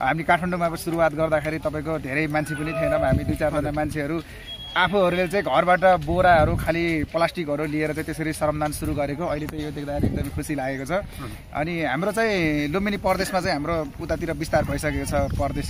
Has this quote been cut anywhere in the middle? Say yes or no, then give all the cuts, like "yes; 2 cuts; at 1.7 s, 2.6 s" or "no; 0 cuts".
no; 0 cuts